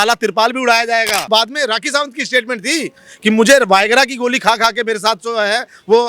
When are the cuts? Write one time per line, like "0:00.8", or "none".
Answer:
0:01.3